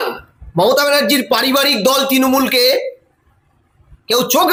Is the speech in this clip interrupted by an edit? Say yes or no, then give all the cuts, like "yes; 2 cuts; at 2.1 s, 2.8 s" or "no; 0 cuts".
no; 0 cuts